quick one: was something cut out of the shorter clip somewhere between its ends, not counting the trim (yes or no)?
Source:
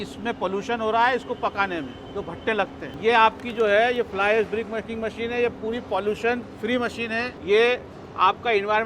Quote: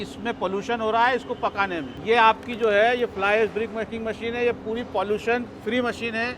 yes